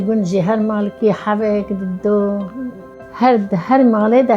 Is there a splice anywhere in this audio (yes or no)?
yes